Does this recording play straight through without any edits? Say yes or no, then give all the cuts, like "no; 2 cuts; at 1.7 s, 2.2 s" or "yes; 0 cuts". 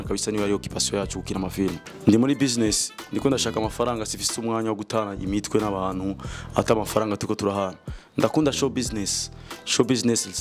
no; 1 cut; at 1.9 s